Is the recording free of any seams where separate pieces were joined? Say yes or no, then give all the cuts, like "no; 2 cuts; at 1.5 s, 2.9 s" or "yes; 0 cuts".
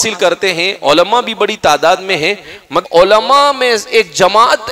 no; 1 cut; at 2.8 s